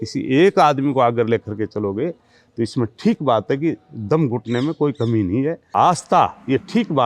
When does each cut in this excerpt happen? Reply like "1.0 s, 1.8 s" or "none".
5.6 s